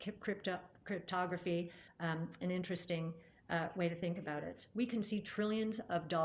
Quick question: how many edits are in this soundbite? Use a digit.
1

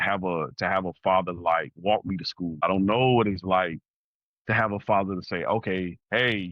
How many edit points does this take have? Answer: 1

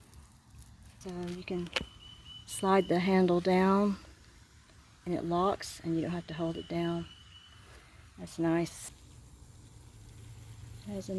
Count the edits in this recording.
2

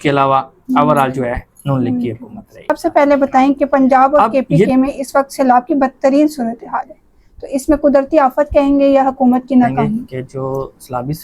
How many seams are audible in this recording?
2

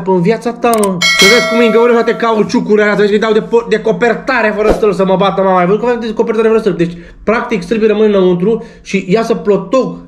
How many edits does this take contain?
1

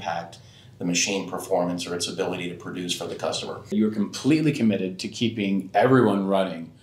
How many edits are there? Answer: 1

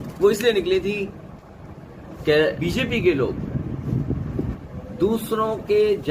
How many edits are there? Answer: 1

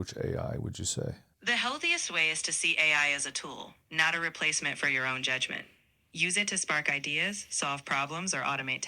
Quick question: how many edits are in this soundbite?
1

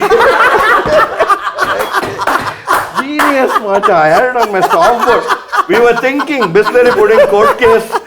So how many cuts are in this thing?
0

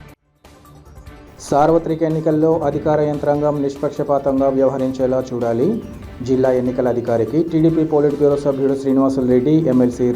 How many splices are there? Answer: 1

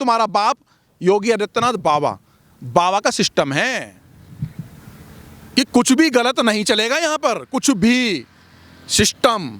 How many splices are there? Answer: 0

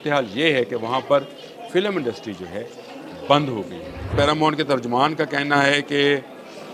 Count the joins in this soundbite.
1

